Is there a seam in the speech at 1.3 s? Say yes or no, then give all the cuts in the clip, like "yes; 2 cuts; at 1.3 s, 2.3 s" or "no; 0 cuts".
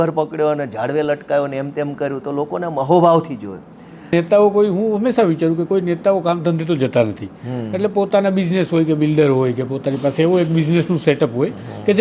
no; 1 cut; at 4.1 s